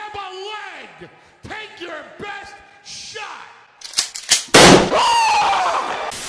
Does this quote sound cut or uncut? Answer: uncut